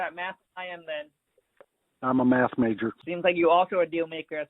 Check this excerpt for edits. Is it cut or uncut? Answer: cut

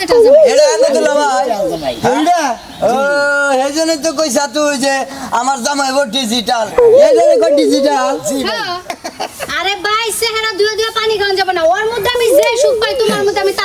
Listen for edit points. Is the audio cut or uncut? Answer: cut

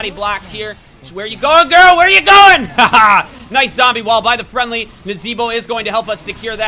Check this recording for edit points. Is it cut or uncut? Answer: uncut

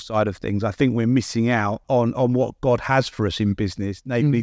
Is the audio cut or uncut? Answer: cut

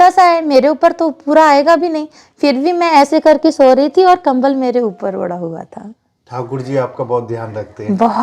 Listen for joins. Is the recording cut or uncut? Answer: uncut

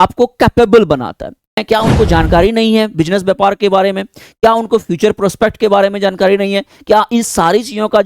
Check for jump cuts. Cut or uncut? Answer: cut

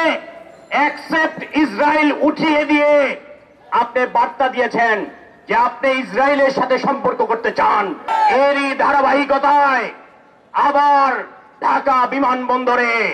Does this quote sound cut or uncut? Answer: cut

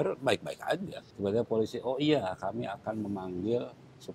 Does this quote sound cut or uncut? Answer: cut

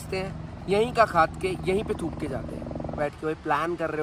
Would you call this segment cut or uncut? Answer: cut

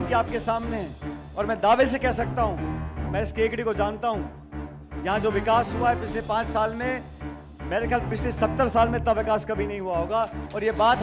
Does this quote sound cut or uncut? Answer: uncut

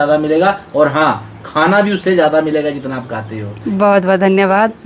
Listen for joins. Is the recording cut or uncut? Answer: uncut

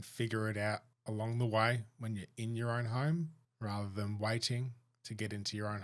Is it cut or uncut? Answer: cut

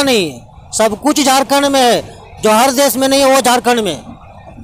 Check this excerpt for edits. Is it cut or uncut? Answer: uncut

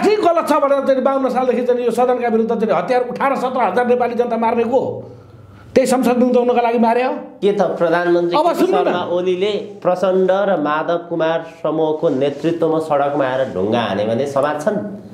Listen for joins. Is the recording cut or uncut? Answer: cut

